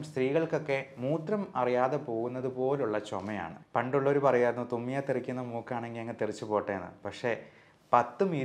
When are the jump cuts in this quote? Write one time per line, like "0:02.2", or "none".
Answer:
0:03.6